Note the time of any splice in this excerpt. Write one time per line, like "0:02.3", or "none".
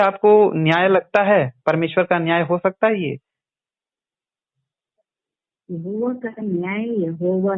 none